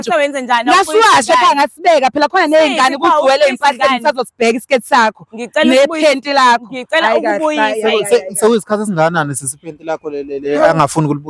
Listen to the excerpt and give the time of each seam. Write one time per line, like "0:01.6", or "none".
none